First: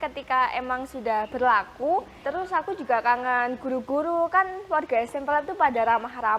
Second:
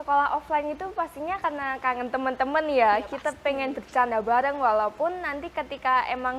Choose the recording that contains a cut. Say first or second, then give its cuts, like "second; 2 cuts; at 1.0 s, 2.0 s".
first; 1 cut; at 2.2 s